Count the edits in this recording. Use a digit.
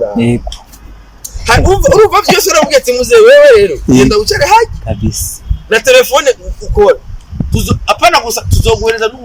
0